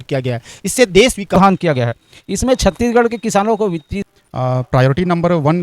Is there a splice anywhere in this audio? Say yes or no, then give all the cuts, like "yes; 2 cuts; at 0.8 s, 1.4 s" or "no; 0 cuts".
yes; 2 cuts; at 1.3 s, 4.0 s